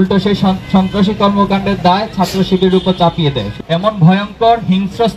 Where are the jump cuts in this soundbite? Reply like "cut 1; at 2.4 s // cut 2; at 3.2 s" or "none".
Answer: cut 1; at 3.4 s